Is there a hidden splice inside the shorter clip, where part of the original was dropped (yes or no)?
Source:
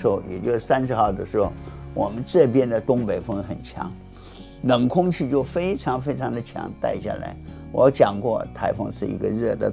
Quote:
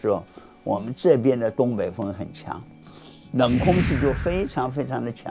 no